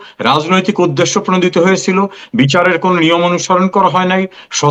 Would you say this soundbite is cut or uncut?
uncut